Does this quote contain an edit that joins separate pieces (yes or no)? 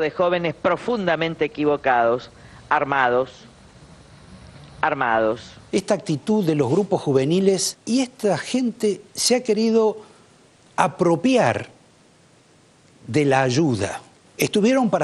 yes